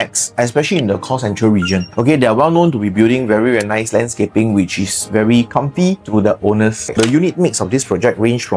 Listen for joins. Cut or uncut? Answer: cut